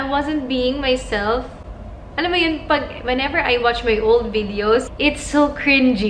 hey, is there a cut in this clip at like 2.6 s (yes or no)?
no